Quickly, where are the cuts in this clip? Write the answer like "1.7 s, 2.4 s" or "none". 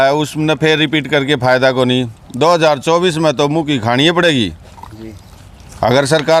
none